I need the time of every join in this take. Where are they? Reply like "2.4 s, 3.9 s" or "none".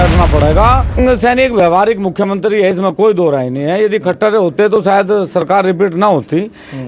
1.0 s